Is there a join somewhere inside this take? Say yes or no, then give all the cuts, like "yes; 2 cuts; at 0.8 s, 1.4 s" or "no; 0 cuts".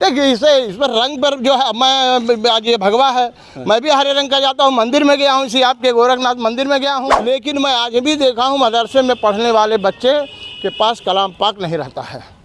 yes; 1 cut; at 7.1 s